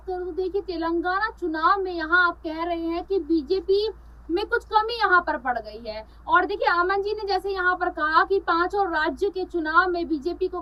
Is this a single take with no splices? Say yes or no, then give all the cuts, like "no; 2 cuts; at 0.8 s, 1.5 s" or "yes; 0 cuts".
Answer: yes; 0 cuts